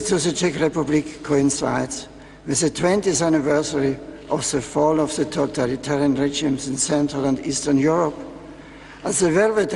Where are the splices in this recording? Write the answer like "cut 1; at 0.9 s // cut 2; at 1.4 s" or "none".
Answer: cut 1; at 7.0 s